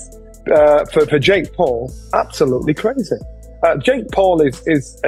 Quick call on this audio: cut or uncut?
uncut